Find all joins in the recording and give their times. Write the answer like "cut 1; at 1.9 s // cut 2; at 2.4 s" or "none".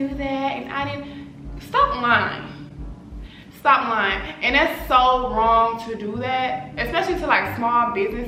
none